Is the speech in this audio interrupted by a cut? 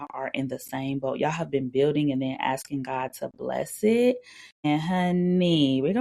yes; 1 cut; at 4.7 s

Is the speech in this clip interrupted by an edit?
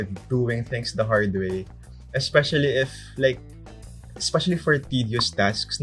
no; 0 cuts

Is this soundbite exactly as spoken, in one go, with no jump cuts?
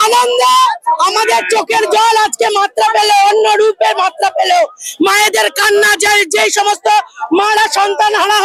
yes; 0 cuts

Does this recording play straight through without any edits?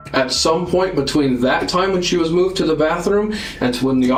yes; 0 cuts

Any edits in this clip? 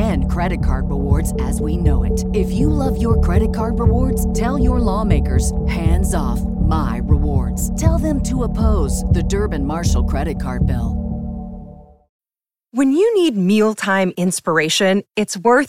yes; 1 cut; at 12.3 s

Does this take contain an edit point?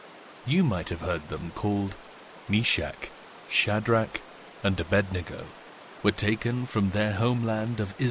no; 0 cuts

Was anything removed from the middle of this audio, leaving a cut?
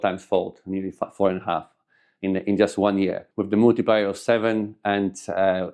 no; 0 cuts

